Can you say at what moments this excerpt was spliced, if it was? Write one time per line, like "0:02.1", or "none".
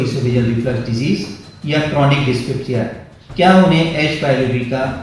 none